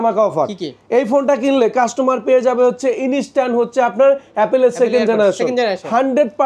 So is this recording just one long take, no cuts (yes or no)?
yes